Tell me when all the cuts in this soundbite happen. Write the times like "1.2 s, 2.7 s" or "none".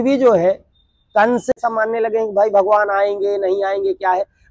1.6 s